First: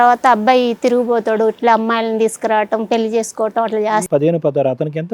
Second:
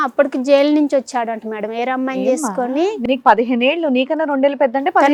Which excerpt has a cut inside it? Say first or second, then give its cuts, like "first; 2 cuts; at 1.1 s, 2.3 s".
first; 1 cut; at 4.0 s